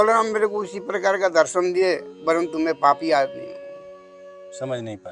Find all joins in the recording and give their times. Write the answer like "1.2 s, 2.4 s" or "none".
none

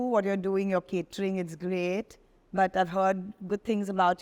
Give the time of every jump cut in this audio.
none

